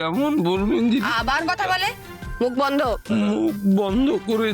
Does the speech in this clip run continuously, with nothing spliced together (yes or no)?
yes